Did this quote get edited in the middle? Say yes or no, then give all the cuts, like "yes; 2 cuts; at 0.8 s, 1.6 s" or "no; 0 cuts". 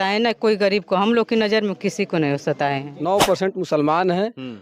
yes; 1 cut; at 2.9 s